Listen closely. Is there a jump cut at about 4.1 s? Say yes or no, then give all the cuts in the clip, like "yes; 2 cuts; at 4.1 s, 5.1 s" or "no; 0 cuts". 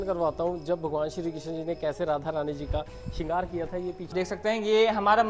yes; 1 cut; at 4.1 s